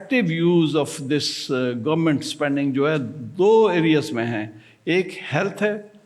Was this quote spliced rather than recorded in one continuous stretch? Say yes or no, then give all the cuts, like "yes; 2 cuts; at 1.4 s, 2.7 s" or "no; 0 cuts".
no; 0 cuts